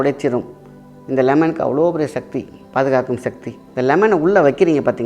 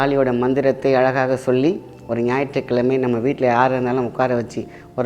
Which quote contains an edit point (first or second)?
first